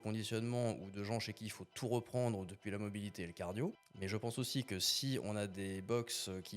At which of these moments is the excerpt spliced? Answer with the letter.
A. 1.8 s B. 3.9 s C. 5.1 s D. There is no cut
B